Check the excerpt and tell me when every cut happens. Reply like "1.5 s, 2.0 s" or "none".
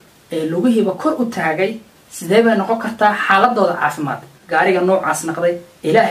4.4 s